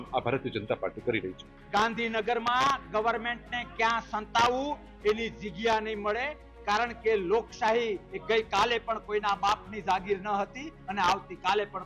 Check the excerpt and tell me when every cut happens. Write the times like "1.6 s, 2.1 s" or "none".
1.5 s